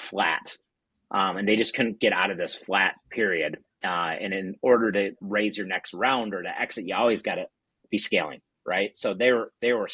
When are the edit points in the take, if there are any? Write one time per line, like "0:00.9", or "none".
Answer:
none